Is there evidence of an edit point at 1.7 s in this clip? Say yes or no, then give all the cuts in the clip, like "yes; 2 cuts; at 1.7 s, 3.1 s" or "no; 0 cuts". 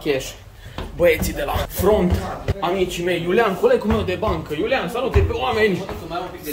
yes; 2 cuts; at 1.7 s, 2.5 s